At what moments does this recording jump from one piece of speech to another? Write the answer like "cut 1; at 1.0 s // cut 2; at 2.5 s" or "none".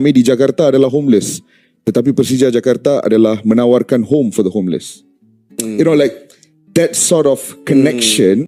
none